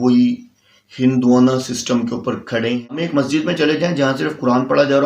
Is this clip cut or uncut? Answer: cut